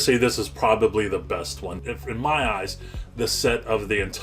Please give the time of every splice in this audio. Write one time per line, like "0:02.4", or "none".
0:01.7